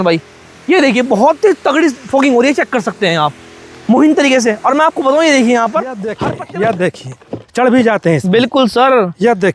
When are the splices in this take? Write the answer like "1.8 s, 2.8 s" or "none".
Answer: 6.1 s